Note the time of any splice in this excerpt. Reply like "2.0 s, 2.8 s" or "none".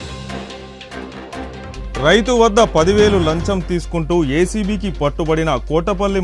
none